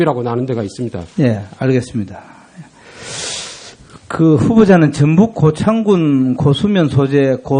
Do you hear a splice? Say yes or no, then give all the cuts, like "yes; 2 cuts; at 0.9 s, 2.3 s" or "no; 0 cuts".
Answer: no; 0 cuts